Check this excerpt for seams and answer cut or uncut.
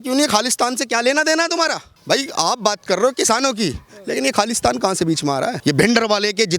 cut